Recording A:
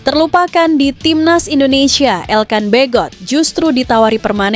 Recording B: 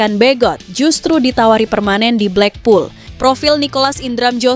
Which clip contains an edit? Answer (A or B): B